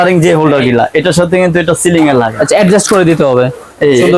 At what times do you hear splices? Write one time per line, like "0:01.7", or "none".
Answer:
none